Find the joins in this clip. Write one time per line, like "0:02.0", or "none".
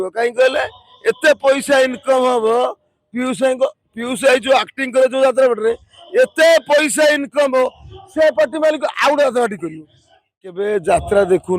0:10.6